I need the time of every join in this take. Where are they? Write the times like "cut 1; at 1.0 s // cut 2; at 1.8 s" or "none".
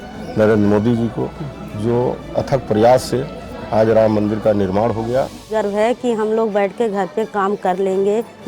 cut 1; at 5.5 s